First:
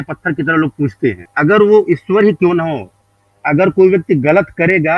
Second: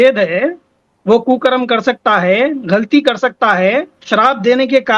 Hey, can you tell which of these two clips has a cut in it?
first; 1 cut; at 1.3 s

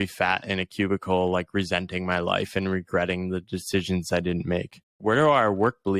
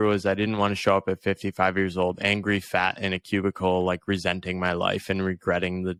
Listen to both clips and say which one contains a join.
first; 1 cut; at 5.0 s

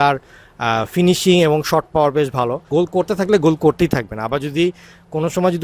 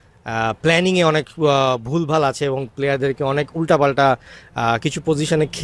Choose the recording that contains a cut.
first; 1 cut; at 2.7 s

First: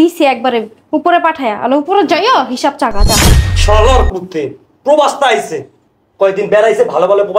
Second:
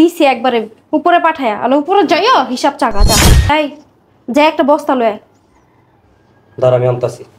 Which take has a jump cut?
second; 1 cut; at 3.4 s

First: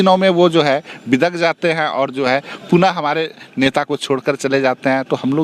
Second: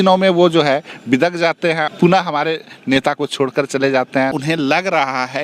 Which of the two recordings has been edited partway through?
second; 2 cuts; at 1.9 s, 4.3 s

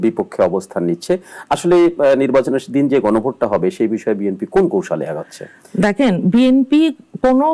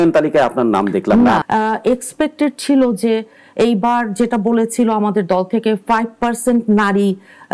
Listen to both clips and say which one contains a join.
second; 1 cut; at 1.4 s

